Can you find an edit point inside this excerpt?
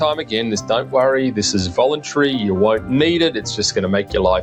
no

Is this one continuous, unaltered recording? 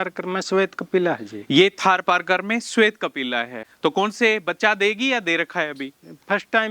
no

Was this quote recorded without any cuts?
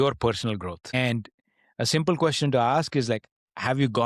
no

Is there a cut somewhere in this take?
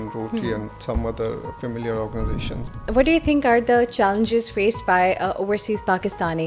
yes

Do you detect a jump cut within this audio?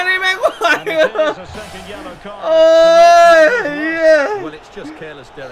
no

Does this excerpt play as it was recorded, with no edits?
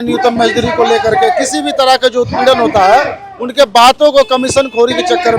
yes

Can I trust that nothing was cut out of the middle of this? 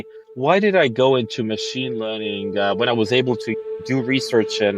yes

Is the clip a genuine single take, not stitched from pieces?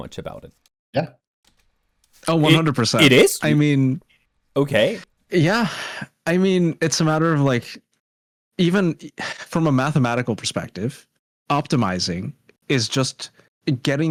yes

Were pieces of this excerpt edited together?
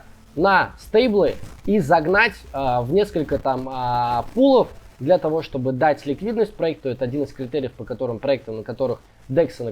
no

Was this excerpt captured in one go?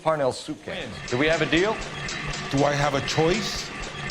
no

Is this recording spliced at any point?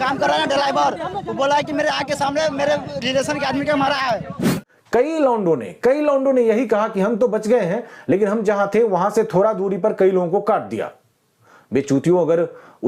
no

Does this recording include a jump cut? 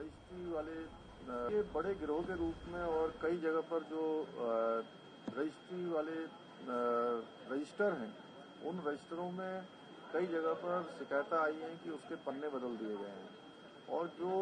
yes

